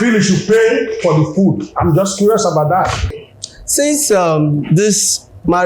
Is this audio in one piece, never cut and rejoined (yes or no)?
no